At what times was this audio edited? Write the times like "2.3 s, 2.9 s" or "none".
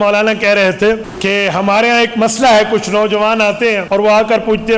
1.1 s, 3.8 s